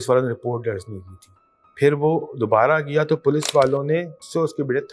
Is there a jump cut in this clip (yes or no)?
no